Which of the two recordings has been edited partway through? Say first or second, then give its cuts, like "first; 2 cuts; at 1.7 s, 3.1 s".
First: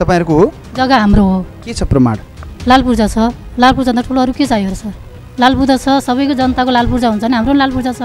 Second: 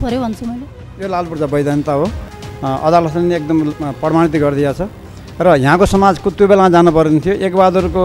second; 1 cut; at 1.2 s